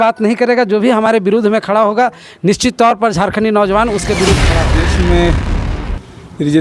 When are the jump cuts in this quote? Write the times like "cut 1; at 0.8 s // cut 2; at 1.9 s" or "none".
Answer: cut 1; at 4.6 s